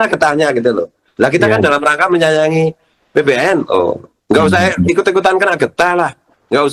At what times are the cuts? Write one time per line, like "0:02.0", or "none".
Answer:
none